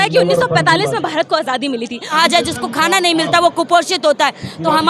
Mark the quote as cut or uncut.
cut